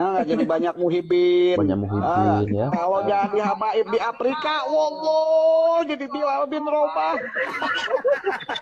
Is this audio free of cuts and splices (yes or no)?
yes